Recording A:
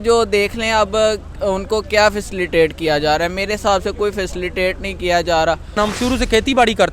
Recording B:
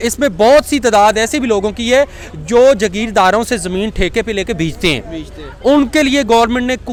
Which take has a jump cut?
A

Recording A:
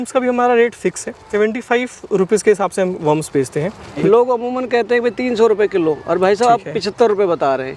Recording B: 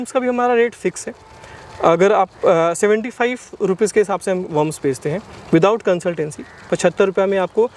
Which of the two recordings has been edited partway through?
A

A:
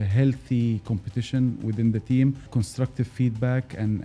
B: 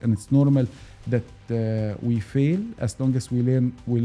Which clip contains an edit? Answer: A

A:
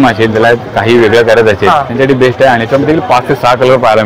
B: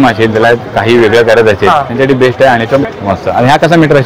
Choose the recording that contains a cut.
B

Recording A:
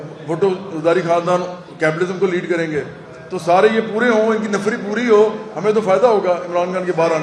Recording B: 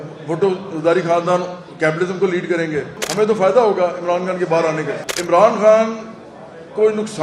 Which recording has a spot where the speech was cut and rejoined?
B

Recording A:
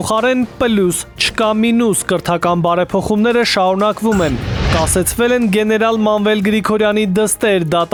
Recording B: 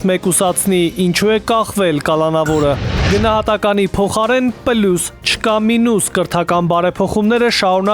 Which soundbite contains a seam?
B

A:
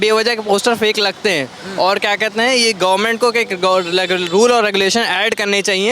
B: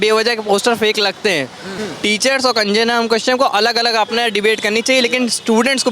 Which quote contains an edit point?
B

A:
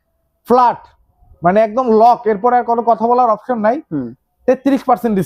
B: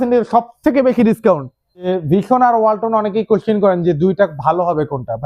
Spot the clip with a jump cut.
B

